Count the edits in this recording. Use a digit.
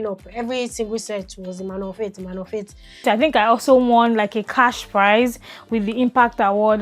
1